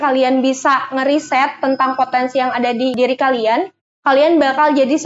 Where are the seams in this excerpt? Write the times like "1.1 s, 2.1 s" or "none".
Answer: 2.9 s